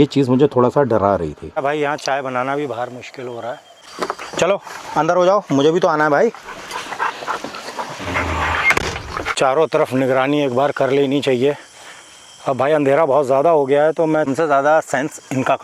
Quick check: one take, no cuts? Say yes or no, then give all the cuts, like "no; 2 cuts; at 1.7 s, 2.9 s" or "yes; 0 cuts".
no; 4 cuts; at 1.6 s, 3.9 s, 9.3 s, 14.3 s